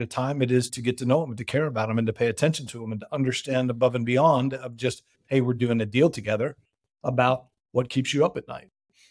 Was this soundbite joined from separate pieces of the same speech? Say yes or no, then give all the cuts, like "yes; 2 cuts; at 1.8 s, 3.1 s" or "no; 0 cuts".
no; 0 cuts